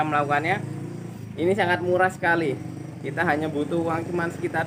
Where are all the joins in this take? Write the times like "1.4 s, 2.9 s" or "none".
none